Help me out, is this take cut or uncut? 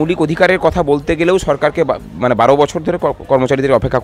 uncut